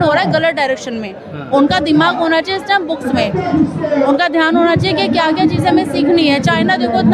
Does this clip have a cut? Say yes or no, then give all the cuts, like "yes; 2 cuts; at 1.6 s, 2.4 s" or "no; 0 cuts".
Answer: no; 0 cuts